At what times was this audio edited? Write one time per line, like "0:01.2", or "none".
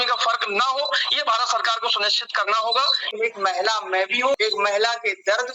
0:03.0
0:04.4